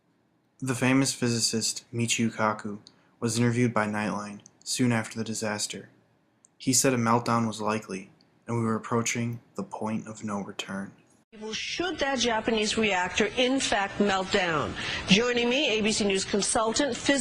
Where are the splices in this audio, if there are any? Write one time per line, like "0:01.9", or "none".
0:09.1